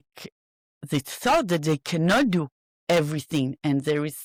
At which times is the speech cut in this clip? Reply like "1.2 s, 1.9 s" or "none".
none

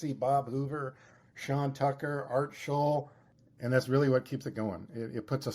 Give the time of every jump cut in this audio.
3.2 s

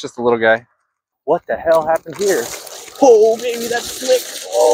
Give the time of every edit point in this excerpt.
1.1 s

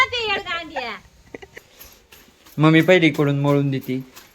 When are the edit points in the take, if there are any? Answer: 1.5 s

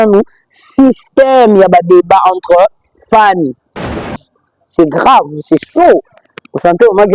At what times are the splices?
4.1 s

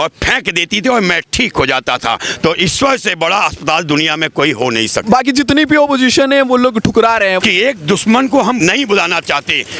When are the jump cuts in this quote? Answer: 2.3 s, 5.1 s, 7.4 s, 8.6 s

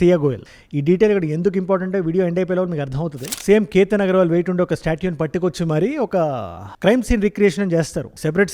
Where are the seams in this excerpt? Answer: 3.2 s

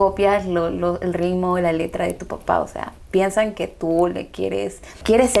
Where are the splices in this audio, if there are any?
none

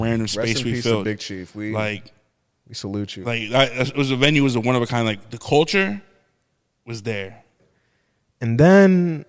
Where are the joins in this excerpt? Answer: 7.6 s

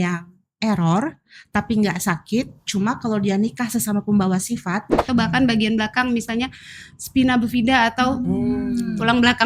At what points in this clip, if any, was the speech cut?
4.9 s

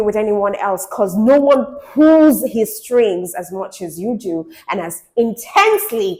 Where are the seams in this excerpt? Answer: none

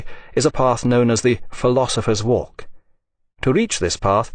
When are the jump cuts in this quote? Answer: none

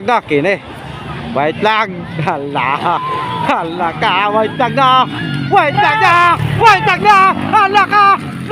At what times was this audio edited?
none

